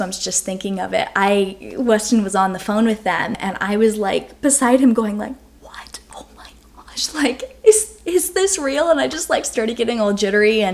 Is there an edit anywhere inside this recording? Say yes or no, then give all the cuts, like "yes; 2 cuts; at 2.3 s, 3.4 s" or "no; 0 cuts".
no; 0 cuts